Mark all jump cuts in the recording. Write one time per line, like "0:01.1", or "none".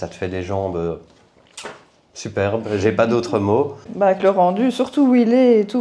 0:03.9